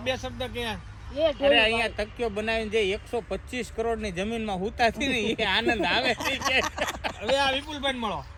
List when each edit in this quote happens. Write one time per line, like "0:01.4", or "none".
none